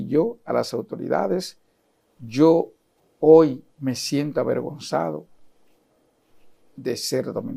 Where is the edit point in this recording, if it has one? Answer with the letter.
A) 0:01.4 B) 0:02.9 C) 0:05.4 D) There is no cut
D